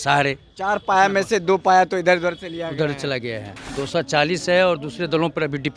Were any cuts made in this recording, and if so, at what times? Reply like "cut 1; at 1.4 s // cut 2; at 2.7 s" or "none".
cut 1; at 3.6 s